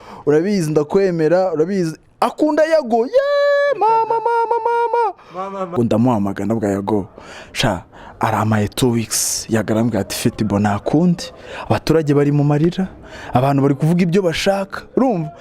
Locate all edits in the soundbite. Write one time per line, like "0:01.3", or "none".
0:05.7